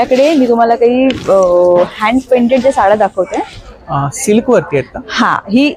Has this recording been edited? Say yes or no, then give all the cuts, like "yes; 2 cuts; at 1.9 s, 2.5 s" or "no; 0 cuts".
no; 0 cuts